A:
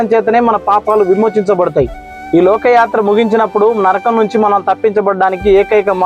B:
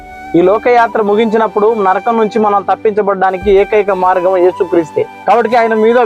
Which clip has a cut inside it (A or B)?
B